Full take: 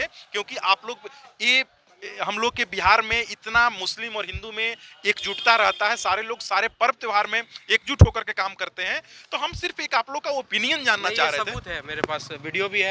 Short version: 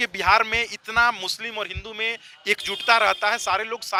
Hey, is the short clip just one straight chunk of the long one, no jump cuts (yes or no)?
yes